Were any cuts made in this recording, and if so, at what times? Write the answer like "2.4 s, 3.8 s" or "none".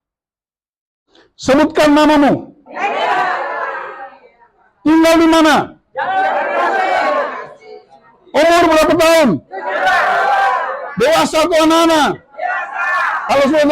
2.7 s